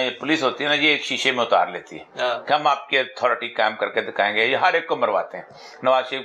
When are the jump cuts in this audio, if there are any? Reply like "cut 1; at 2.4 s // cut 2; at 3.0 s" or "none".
none